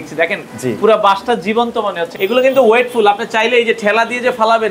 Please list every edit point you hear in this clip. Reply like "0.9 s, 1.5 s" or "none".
2.1 s